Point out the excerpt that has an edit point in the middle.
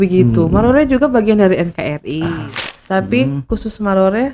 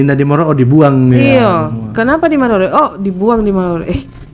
first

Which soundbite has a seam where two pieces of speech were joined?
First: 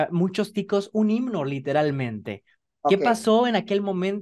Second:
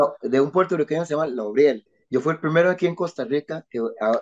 second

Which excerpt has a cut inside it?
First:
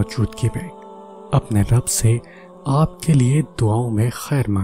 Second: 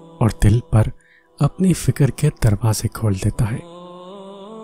second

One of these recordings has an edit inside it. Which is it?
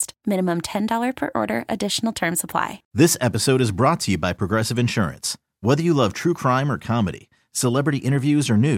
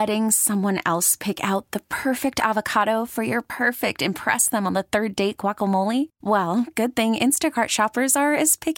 first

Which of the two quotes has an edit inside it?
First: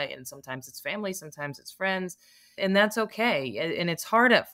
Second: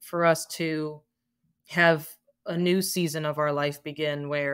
first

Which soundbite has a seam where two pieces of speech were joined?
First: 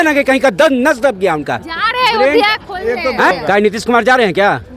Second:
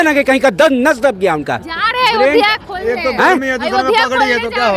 first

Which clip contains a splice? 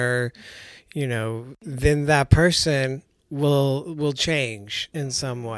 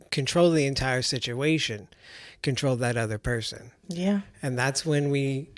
first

